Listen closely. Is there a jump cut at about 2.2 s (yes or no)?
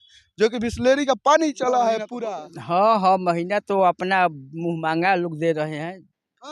yes